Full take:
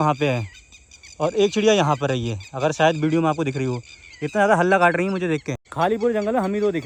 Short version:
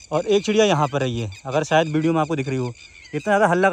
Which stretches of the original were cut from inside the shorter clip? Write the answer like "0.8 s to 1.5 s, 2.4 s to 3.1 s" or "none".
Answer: none